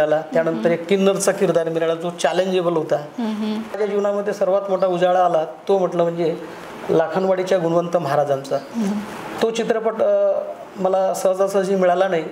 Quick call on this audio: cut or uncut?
cut